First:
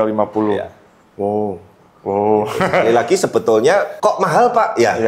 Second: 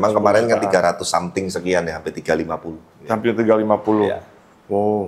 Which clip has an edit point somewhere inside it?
first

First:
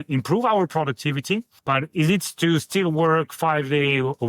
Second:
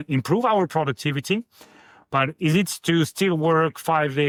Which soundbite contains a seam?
first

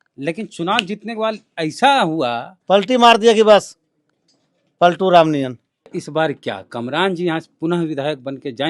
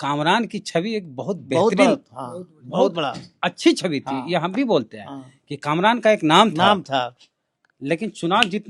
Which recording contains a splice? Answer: first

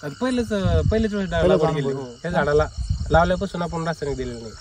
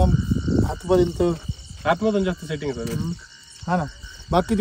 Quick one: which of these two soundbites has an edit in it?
first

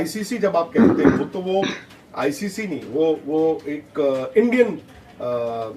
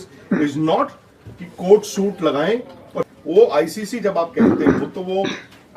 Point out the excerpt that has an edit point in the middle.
second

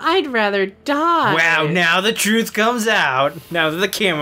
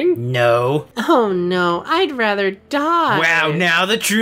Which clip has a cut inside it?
second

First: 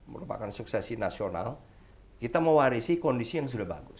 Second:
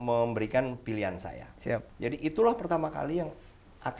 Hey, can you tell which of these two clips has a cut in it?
second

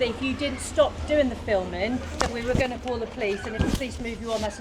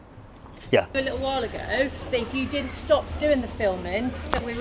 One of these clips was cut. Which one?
second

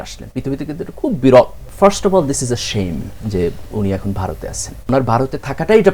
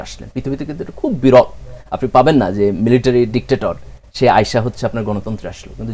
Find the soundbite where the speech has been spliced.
first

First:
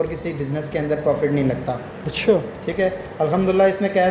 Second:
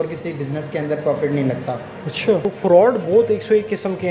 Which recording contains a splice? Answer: second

